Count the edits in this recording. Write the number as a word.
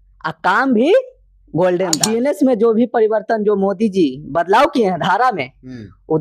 one